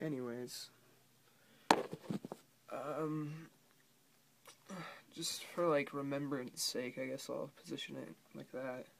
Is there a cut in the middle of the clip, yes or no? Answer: no